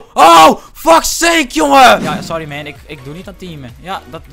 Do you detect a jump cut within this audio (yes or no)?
yes